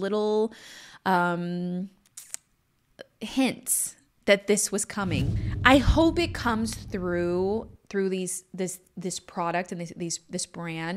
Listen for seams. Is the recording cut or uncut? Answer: cut